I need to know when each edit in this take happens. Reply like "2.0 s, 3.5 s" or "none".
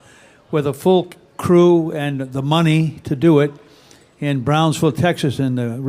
4.9 s